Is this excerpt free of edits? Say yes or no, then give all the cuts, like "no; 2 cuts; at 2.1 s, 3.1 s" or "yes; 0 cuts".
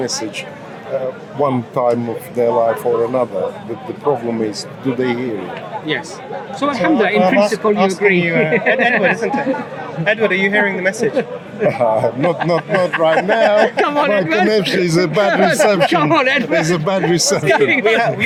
yes; 0 cuts